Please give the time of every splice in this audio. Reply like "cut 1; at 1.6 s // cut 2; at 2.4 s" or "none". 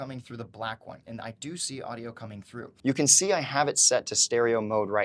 cut 1; at 2.7 s